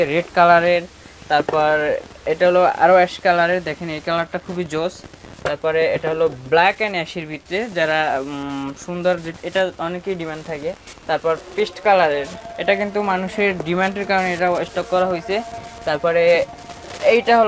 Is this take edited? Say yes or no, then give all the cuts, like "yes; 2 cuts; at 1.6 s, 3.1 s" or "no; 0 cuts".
no; 0 cuts